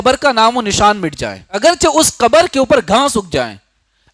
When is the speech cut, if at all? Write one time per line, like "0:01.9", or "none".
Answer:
0:01.6